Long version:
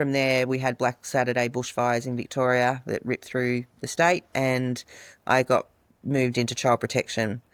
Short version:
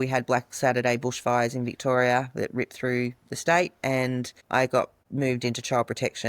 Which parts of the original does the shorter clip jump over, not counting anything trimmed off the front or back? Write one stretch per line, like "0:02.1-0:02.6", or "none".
0:04.9-0:05.1
0:05.8-0:05.9